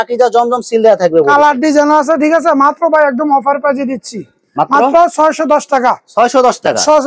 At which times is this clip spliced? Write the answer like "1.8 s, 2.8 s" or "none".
none